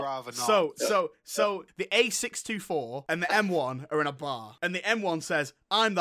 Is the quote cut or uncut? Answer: cut